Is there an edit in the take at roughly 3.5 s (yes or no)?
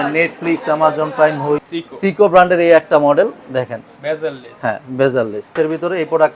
no